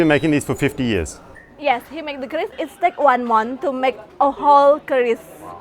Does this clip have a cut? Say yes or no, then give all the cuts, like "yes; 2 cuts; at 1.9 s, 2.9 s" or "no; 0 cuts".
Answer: yes; 1 cut; at 2.5 s